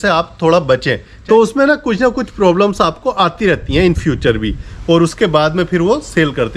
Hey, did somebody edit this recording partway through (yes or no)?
yes